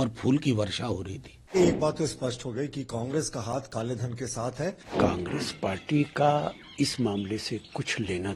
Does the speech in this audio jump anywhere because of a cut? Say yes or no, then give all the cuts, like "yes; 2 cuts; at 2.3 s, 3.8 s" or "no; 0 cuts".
yes; 2 cuts; at 1.5 s, 4.8 s